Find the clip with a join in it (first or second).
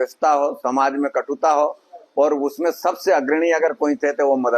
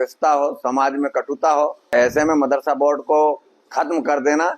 second